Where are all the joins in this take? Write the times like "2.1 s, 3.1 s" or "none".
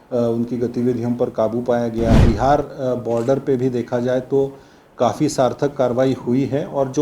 2.2 s